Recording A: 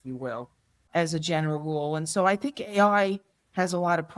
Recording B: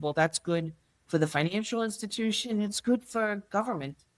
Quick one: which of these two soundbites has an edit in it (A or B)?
A